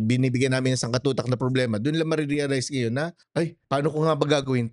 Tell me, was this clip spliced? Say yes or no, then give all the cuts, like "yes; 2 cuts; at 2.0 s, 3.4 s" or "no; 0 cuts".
yes; 1 cut; at 3.4 s